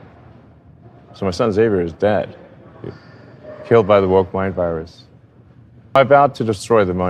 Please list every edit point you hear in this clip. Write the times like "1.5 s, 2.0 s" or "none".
6.0 s